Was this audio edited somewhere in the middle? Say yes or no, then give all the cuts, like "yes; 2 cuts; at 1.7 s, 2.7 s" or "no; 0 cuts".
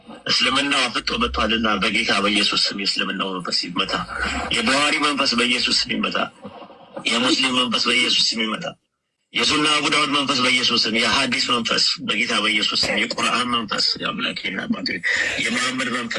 no; 0 cuts